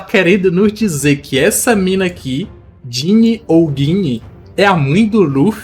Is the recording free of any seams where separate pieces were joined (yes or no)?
yes